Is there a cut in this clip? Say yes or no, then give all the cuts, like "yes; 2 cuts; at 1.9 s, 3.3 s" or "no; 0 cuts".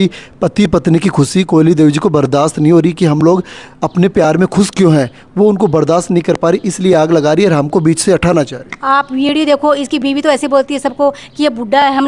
no; 0 cuts